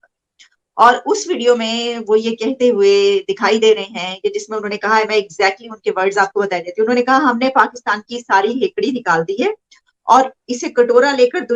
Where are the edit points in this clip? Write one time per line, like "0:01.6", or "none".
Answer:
none